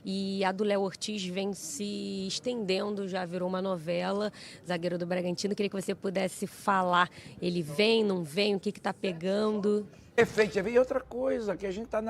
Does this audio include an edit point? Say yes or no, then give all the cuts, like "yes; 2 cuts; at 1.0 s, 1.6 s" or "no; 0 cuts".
yes; 1 cut; at 10.2 s